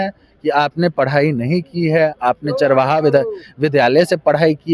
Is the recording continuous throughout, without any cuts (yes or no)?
yes